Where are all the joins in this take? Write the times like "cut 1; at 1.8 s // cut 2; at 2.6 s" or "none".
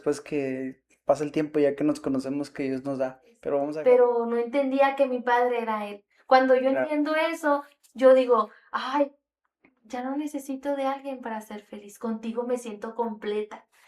cut 1; at 3.7 s